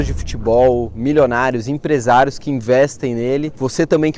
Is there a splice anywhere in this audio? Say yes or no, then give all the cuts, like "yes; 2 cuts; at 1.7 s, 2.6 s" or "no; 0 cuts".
no; 0 cuts